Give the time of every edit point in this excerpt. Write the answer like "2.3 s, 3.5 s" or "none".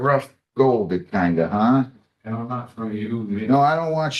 none